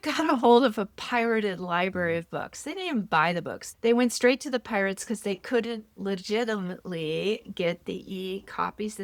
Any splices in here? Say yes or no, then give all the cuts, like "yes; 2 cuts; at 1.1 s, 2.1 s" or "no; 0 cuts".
no; 0 cuts